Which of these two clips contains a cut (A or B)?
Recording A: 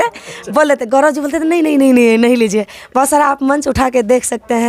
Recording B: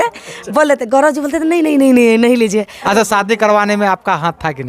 B